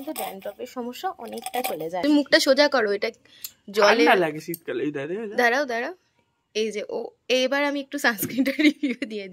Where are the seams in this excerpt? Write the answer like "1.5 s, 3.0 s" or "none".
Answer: 2.0 s

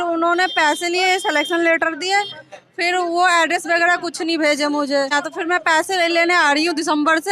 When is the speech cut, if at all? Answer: 5.1 s

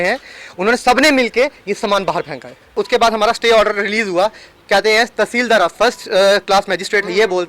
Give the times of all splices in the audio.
2.7 s

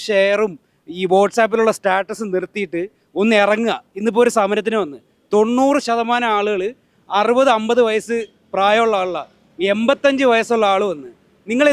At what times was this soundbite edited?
none

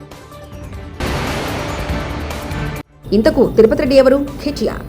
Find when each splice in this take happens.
1.0 s, 2.9 s

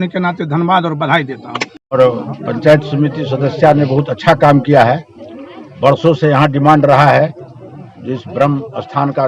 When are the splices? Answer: 1.9 s

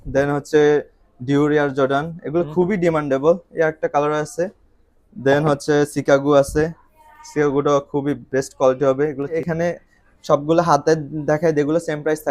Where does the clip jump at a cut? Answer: 9.4 s

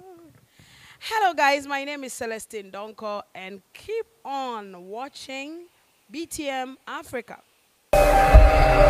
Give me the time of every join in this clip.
7.9 s

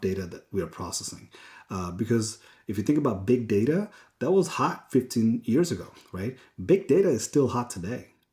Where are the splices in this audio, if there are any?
none

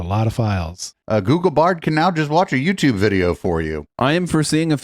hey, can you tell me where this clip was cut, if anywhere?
0.9 s, 3.8 s

